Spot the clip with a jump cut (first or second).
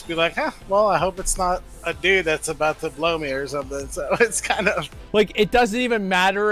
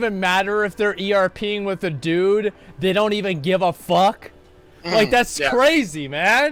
first